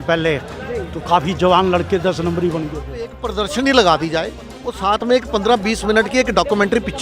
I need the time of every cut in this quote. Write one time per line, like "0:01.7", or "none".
0:03.3
0:04.7